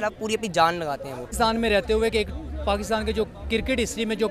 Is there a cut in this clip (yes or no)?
yes